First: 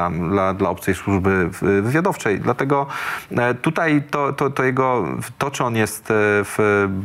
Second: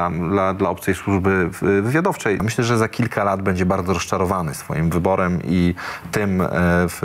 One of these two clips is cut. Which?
second; 1 cut; at 2.4 s

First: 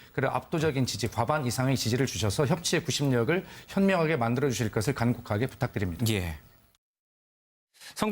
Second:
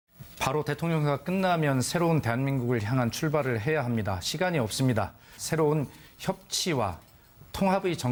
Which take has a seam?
first; 1 cut; at 2.6 s

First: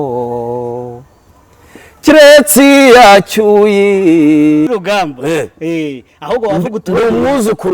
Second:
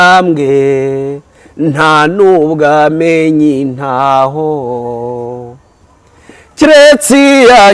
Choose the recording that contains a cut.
first; 1 cut; at 4.7 s

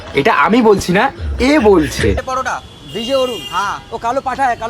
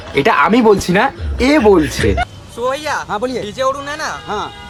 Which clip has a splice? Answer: first; 1 cut; at 2.2 s

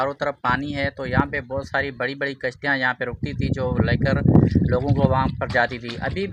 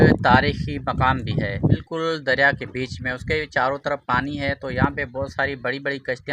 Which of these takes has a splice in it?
second; 1 cut; at 1.9 s

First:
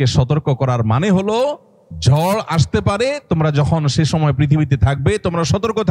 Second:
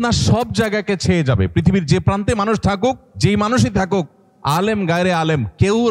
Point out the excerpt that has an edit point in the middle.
second; 1 cut; at 3.1 s

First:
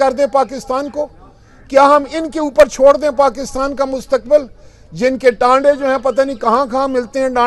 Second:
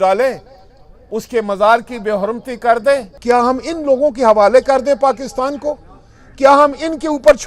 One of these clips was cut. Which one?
second; 1 cut; at 3.1 s

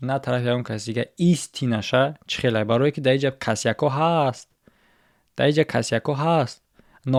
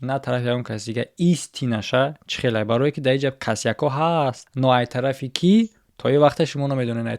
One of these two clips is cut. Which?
second; 1 cut; at 4.5 s

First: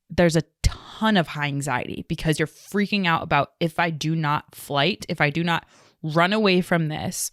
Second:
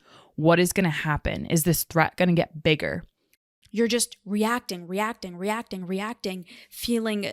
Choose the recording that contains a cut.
second; 1 cut; at 3.6 s

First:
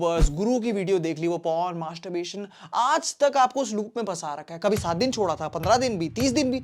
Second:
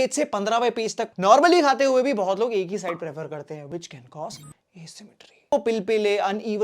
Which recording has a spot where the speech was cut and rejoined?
second; 2 cuts; at 1.1 s, 5.5 s

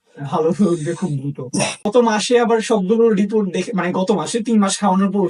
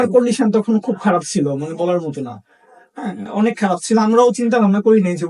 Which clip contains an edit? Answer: first; 1 cut; at 1.8 s

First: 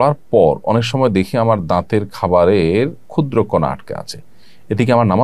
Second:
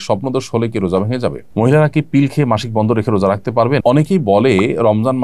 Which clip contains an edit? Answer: second; 2 cuts; at 1.5 s, 3.8 s

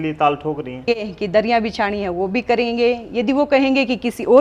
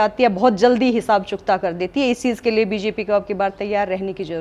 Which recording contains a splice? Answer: first; 1 cut; at 1.1 s

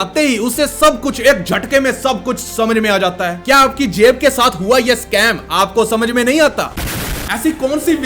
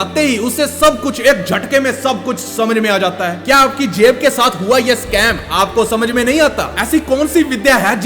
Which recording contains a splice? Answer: second; 1 cut; at 6.7 s

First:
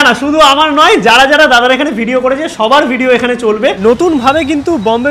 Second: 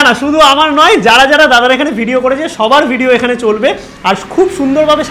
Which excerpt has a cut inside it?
first; 1 cut; at 3.8 s

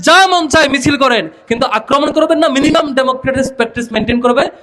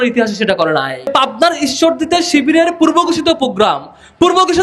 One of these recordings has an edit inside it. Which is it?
second; 1 cut; at 1.1 s

